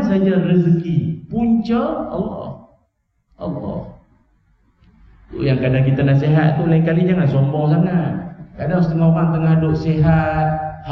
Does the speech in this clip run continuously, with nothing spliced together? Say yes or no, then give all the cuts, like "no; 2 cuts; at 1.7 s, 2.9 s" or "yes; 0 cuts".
yes; 0 cuts